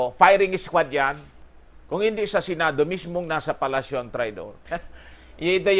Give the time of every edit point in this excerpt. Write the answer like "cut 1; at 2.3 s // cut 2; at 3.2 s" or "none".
cut 1; at 1.4 s // cut 2; at 4.6 s

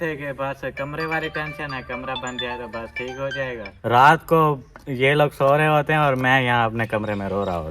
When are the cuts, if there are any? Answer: cut 1; at 3.7 s

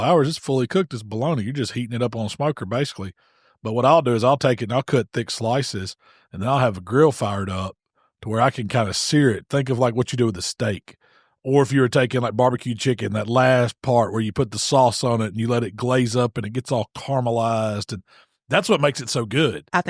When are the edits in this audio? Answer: none

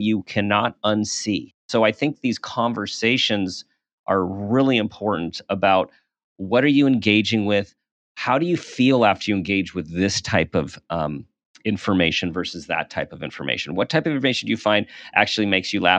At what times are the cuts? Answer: cut 1; at 1.6 s

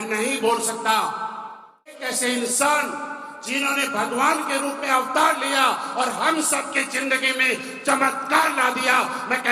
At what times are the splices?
cut 1; at 2.1 s

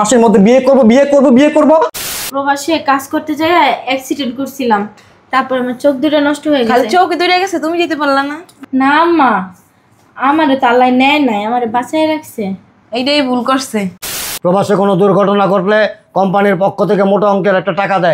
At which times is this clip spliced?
cut 1; at 2.1 s // cut 2; at 14.2 s

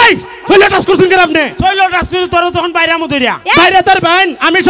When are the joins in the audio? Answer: none

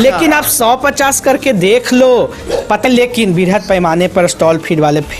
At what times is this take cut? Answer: cut 1; at 2.8 s

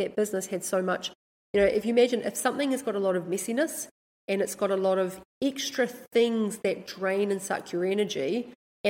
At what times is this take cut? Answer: none

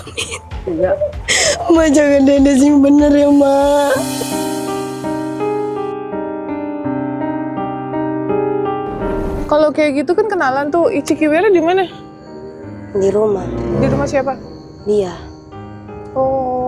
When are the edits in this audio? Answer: cut 1; at 9.3 s

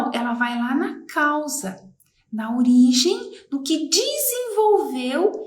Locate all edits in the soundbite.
none

